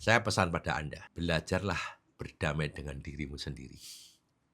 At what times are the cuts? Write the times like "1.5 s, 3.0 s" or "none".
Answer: 1.0 s